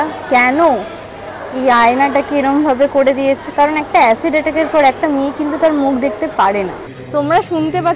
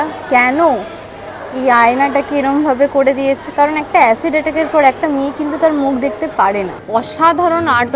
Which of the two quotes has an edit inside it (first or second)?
second